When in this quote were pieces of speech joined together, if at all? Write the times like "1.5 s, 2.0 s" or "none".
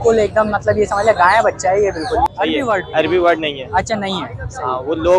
2.3 s